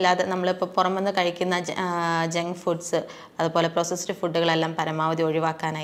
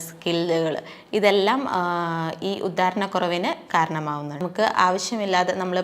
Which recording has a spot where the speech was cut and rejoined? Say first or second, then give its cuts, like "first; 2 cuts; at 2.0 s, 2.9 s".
second; 1 cut; at 4.4 s